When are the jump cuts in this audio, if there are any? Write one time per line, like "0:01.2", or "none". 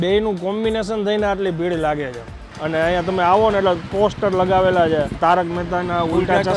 0:02.6
0:05.1